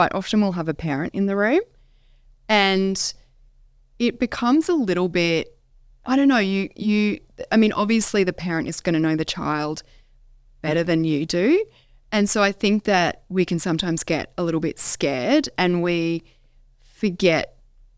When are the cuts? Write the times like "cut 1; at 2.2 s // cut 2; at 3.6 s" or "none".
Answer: none